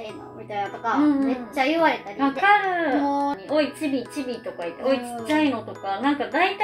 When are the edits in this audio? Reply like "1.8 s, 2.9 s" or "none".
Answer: 3.4 s